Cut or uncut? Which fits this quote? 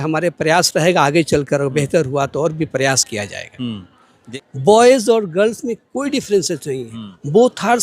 cut